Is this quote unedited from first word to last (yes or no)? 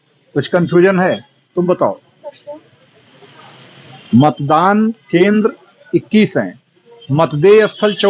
yes